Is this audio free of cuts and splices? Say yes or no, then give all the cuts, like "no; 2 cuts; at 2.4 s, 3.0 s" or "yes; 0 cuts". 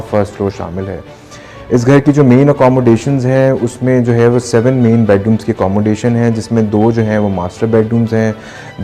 yes; 0 cuts